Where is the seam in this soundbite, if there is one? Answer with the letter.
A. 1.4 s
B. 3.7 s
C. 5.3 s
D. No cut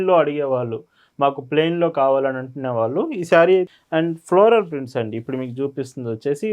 B